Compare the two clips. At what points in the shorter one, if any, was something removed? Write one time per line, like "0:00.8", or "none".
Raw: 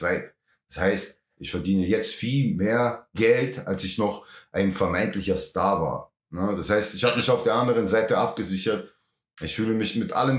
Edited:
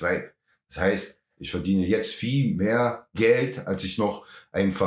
none